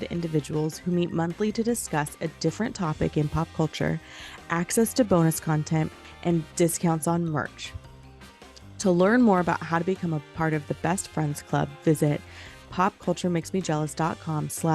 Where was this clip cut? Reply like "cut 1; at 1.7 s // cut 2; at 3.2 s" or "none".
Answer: cut 1; at 6.0 s